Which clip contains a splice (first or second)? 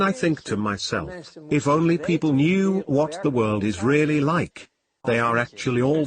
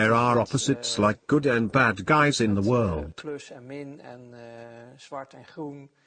first